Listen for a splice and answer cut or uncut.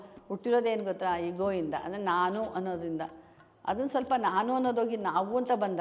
uncut